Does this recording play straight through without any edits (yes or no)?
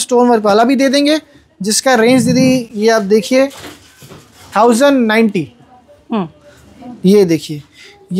yes